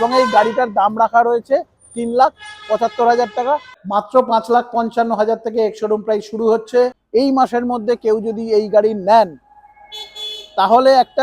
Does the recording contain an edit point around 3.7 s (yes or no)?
yes